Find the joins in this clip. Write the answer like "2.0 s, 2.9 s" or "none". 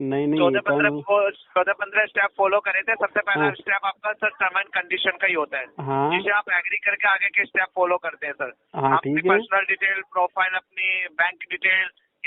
none